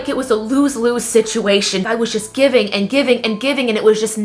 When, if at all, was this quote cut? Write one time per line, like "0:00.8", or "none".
0:01.8